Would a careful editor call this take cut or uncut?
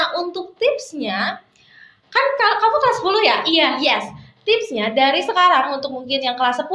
uncut